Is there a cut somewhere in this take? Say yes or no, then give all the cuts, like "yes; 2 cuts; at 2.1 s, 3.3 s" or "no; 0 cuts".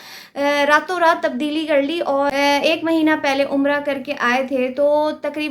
yes; 1 cut; at 2.3 s